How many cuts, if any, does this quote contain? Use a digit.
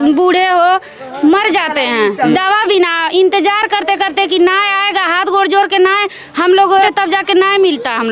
1